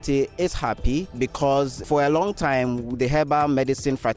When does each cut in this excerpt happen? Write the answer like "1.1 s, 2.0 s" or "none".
1.1 s